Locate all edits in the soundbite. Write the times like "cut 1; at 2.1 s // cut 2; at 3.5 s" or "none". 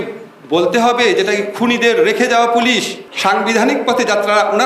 cut 1; at 3.0 s